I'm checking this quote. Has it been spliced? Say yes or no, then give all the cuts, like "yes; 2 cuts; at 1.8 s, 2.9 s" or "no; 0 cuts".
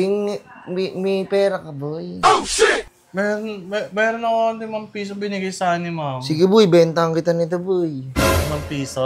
no; 0 cuts